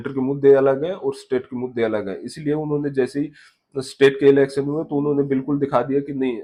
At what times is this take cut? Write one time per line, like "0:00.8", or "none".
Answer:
none